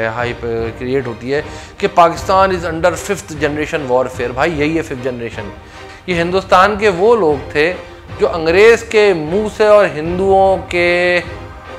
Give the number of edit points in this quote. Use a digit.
1